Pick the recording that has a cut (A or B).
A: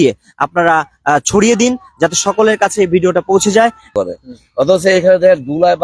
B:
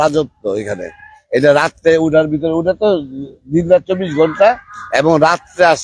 A